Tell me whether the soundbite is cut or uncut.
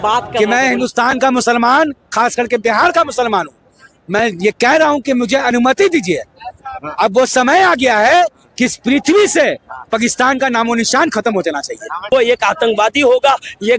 cut